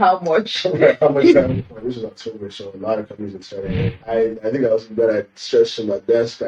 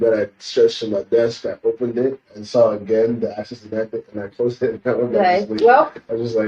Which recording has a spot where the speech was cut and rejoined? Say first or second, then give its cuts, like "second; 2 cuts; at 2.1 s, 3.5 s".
first; 2 cuts; at 1.5 s, 4.0 s